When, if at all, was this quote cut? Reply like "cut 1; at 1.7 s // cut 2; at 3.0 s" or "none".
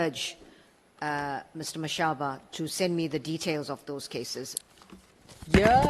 cut 1; at 4.6 s